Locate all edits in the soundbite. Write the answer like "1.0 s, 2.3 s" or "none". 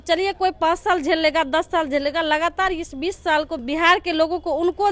3.6 s